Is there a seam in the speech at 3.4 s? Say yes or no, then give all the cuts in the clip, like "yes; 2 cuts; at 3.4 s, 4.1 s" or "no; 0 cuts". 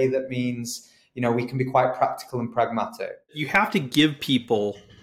yes; 1 cut; at 3.4 s